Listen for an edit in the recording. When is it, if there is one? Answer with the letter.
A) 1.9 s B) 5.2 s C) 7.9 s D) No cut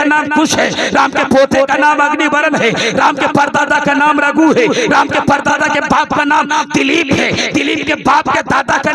D